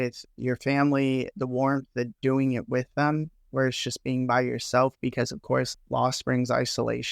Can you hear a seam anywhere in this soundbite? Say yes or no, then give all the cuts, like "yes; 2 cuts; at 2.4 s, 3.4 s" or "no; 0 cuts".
yes; 1 cut; at 5.7 s